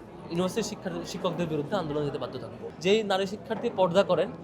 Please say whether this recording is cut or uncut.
cut